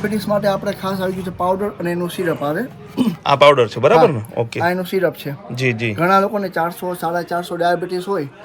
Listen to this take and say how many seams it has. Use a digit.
0